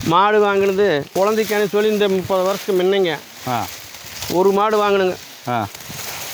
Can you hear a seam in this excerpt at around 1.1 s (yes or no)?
yes